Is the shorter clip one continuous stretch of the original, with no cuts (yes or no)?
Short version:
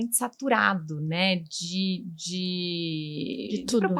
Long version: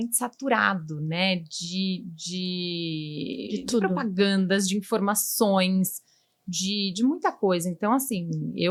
yes